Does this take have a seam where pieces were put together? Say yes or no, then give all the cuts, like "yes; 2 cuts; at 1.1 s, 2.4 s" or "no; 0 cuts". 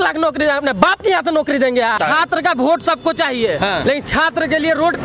yes; 1 cut; at 2.0 s